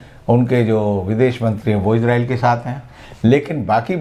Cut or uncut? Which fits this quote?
uncut